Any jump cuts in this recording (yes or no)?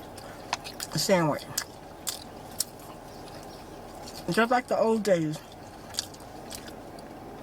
no